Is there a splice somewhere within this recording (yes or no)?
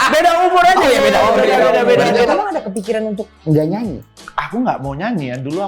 yes